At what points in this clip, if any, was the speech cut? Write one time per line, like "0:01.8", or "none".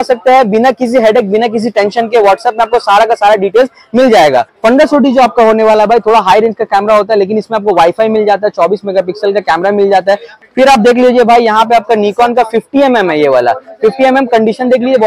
0:04.5
0:10.3

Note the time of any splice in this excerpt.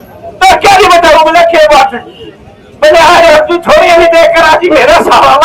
none

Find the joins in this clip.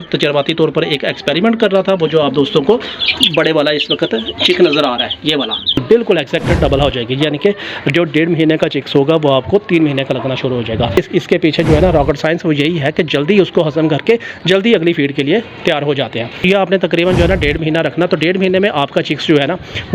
0:05.8
0:10.9
0:16.4

